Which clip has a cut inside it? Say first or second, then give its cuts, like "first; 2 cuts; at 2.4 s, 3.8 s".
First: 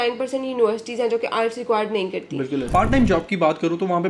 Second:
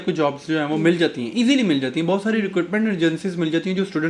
first; 1 cut; at 2.7 s